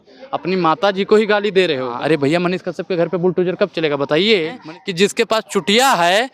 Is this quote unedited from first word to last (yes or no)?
no